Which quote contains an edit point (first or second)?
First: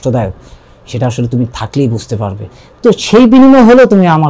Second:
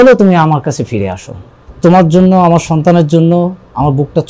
second